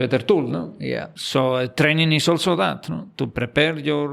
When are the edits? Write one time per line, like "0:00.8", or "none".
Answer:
0:01.1